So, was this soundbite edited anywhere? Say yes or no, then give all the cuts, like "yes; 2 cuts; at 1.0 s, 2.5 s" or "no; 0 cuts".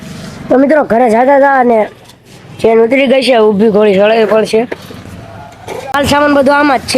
yes; 1 cut; at 5.9 s